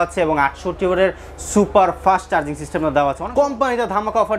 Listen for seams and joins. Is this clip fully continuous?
no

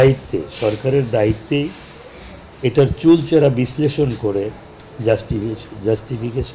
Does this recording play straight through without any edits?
yes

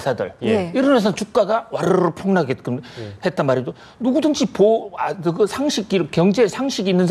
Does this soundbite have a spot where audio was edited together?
no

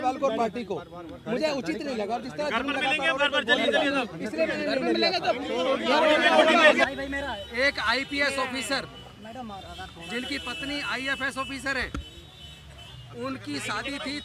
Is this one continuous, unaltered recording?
no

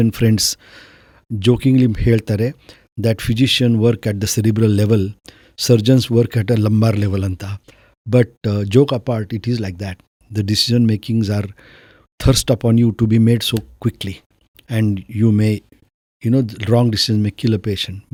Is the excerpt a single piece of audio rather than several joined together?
yes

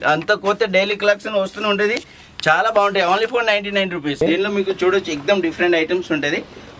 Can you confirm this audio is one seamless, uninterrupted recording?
no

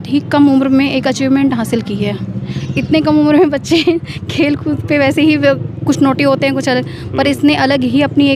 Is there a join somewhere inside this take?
no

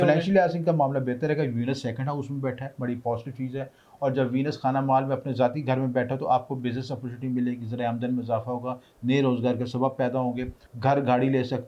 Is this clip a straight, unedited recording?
no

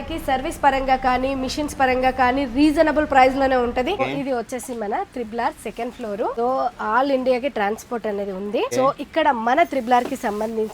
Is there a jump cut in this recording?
yes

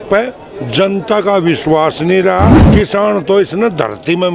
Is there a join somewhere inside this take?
yes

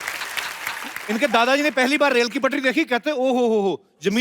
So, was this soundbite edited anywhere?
yes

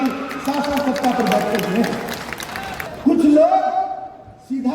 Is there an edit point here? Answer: yes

